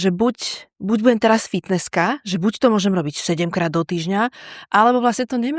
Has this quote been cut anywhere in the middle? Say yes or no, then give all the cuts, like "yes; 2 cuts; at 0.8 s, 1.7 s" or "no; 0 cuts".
no; 0 cuts